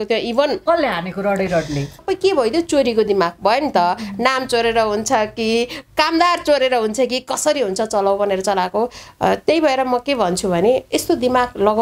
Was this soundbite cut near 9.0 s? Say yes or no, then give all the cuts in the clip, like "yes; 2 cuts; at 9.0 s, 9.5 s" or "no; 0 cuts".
no; 1 cut; at 2.0 s